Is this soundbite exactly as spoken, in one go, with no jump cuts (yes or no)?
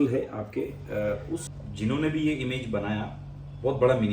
no